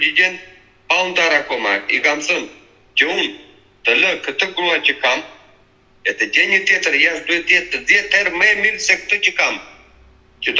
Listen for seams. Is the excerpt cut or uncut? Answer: uncut